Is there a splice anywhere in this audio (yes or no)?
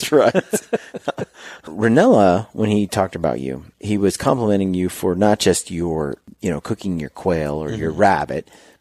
yes